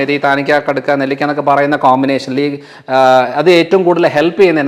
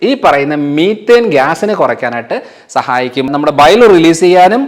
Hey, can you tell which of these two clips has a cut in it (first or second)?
second